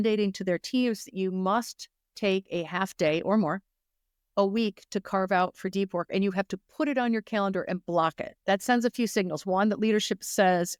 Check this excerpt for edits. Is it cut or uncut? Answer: uncut